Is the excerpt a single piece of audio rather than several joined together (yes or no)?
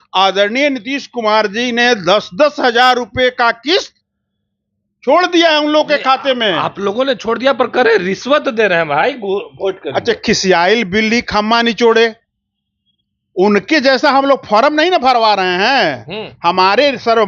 yes